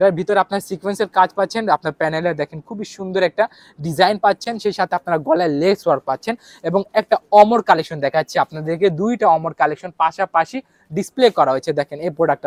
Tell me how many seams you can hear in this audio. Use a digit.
0